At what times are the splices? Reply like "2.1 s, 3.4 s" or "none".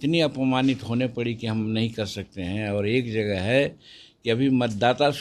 none